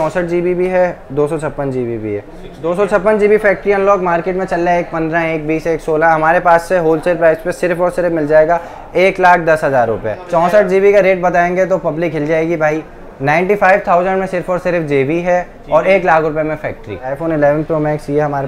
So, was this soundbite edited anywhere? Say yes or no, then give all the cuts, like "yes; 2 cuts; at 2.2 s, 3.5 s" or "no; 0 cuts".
yes; 3 cuts; at 2.5 s, 10.1 s, 17.2 s